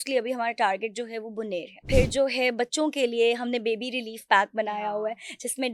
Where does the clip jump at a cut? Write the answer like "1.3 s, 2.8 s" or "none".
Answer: 1.7 s